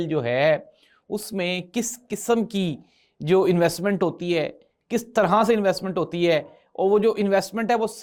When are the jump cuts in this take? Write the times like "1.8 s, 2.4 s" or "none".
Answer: none